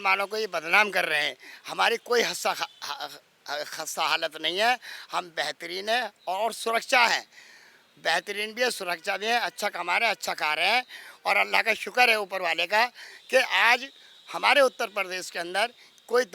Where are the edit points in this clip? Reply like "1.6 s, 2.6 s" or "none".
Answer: none